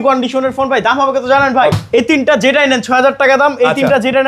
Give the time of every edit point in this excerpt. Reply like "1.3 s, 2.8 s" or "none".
1.8 s